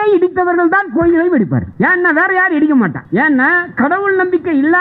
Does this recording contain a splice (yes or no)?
yes